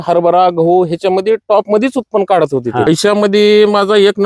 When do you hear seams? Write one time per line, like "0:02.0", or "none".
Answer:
0:02.9